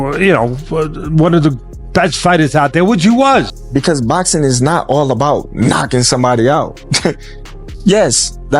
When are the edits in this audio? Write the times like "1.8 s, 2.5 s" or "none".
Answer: 3.6 s